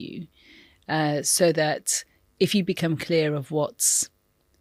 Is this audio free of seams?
yes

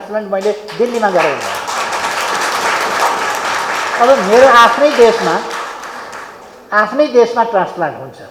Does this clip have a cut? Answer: no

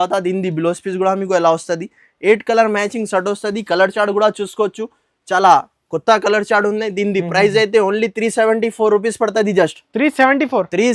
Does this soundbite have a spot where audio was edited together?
no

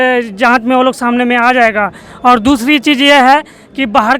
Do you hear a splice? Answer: no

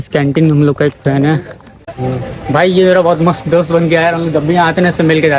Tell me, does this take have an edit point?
yes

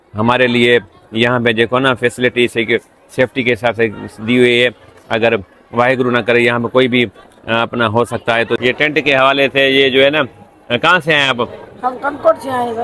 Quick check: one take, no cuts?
no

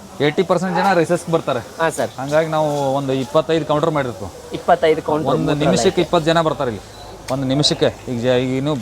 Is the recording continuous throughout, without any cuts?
yes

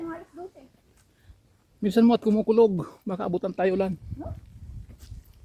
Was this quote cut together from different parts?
no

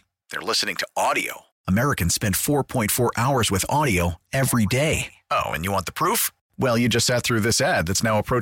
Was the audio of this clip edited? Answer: no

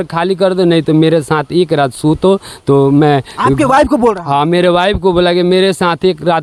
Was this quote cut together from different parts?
no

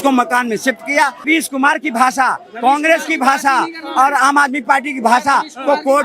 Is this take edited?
yes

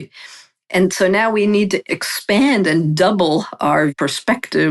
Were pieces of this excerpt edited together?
yes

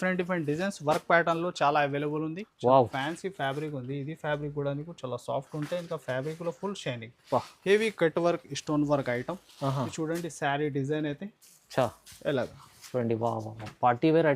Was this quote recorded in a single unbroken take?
no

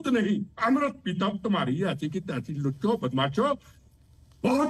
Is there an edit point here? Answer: no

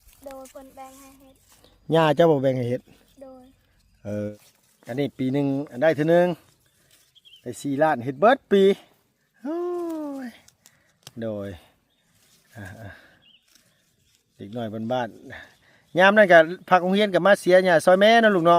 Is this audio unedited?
no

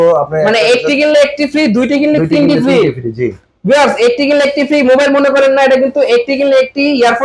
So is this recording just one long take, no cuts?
yes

